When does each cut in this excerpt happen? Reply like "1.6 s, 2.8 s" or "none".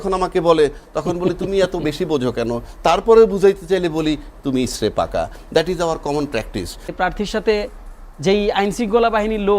6.9 s